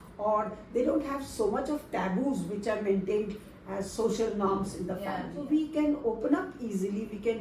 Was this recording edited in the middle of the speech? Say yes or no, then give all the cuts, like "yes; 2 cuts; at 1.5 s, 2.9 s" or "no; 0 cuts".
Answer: yes; 1 cut; at 5.3 s